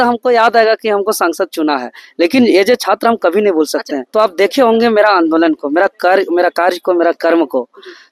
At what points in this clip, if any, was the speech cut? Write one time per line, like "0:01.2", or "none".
0:04.0